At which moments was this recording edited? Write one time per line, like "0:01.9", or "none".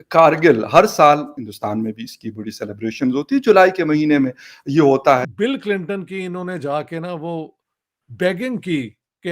0:01.4
0:05.3